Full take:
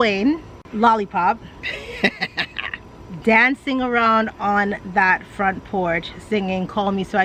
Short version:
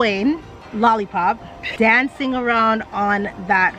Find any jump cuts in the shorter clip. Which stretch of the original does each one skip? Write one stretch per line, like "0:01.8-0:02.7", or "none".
0:01.6-0:03.0